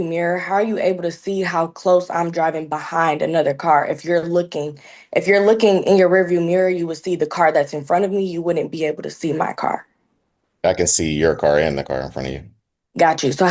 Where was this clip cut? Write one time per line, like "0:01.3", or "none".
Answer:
none

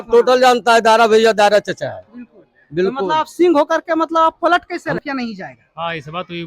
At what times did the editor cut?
0:05.0

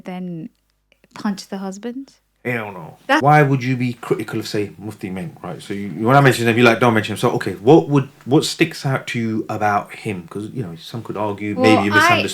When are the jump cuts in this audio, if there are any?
0:03.2

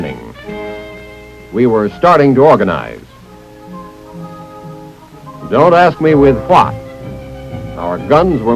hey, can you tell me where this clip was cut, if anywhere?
0:02.6

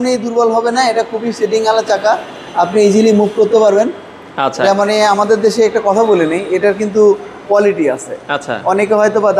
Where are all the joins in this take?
none

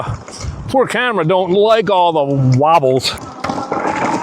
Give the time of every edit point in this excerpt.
0:03.2

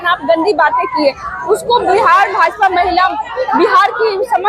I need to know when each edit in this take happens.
none

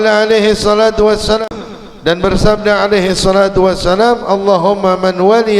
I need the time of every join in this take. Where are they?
0:01.4

